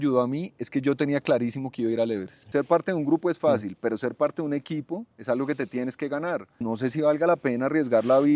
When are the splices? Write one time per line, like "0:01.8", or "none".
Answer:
0:02.4
0:06.6